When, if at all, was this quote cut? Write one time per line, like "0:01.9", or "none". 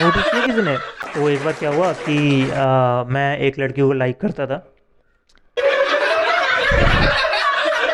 0:01.0

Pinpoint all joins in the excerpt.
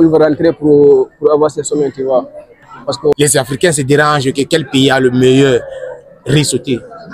0:03.1

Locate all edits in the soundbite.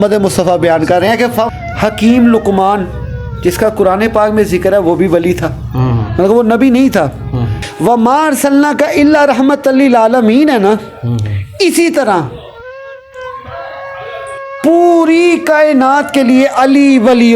0:01.6
0:07.6

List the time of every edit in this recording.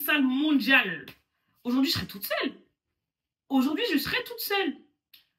none

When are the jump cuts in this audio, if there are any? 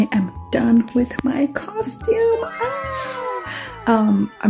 none

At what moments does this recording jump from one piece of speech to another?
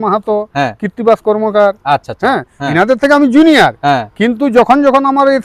none

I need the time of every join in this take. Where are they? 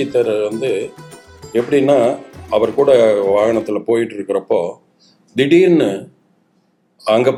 none

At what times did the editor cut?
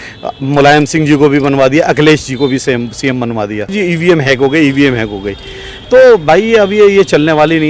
0:03.7

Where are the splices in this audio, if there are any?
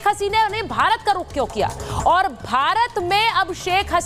none

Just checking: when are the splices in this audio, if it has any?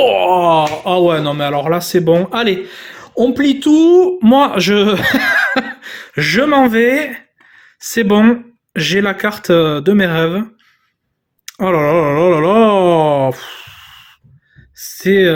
none

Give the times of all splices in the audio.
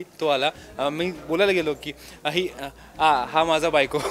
none

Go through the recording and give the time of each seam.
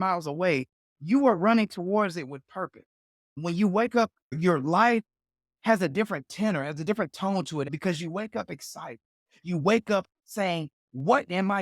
0:03.4

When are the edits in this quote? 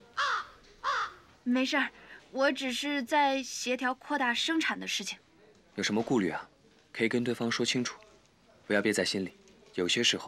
none

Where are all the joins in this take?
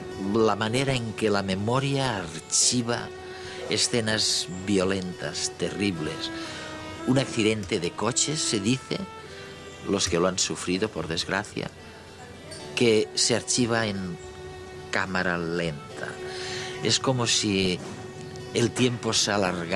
none

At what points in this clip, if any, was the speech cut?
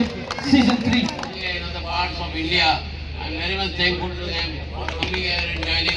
0:01.4

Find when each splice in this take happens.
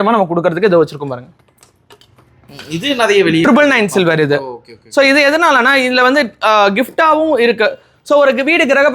none

